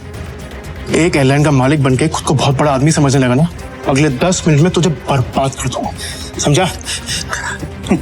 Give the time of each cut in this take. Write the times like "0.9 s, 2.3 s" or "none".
3.7 s